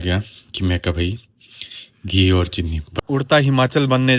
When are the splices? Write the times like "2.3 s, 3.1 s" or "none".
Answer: 2.8 s